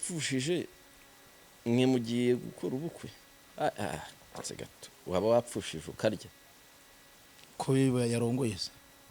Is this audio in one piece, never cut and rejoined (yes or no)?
no